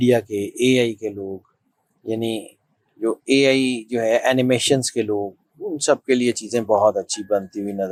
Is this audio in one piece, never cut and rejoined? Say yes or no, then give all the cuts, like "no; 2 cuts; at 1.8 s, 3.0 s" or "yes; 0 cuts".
yes; 0 cuts